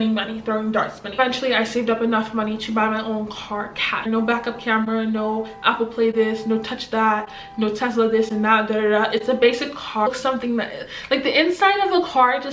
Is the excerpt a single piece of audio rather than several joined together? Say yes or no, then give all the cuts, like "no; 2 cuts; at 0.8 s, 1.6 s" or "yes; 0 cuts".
no; 3 cuts; at 1.2 s, 4.0 s, 10.1 s